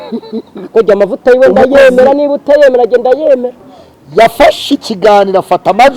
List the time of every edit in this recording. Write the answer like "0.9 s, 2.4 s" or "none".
3.6 s